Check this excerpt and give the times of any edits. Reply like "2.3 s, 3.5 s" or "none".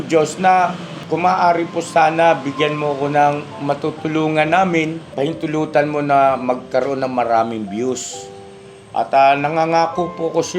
0.9 s, 5.0 s